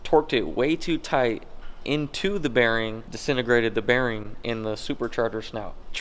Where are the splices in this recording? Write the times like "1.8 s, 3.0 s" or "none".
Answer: none